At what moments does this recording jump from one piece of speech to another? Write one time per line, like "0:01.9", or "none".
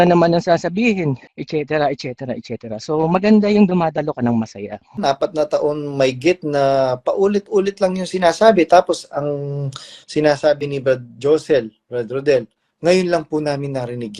0:01.3
0:05.0

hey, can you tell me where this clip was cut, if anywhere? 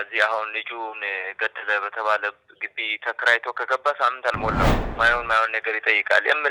0:04.8

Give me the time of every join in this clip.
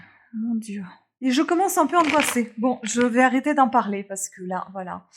0:01.0

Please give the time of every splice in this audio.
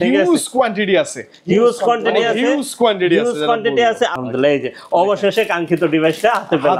0:04.2

